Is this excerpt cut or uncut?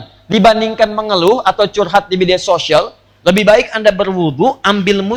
uncut